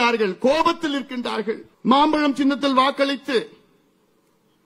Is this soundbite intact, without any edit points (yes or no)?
no